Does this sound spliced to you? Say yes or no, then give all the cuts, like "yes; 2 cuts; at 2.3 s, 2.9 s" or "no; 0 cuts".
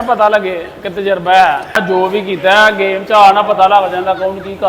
yes; 1 cut; at 1.8 s